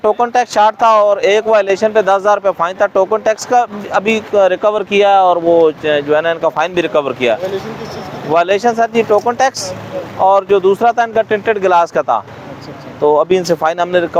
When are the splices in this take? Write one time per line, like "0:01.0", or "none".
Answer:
none